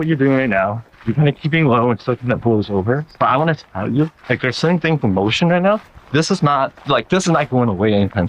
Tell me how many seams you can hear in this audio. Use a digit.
2